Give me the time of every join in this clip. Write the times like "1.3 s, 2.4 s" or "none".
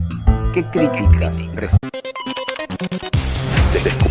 none